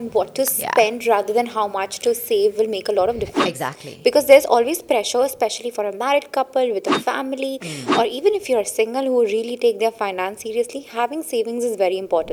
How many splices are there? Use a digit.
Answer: 0